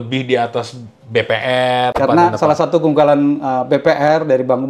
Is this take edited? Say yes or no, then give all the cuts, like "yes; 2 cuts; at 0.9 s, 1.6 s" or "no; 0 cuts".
yes; 1 cut; at 1.9 s